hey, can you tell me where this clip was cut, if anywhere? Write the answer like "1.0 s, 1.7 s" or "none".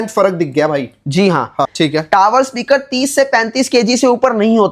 1.7 s